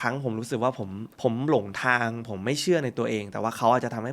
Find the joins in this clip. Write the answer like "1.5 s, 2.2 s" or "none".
1.0 s